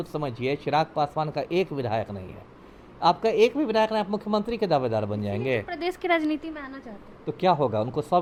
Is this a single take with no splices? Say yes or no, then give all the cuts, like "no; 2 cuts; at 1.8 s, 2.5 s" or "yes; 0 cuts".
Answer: yes; 0 cuts